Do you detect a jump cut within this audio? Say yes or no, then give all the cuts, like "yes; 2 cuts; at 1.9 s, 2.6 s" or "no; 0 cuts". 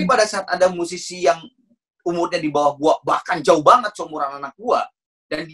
no; 0 cuts